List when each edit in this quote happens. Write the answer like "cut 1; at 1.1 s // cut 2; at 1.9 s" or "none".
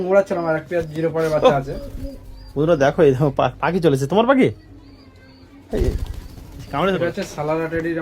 cut 1; at 7.0 s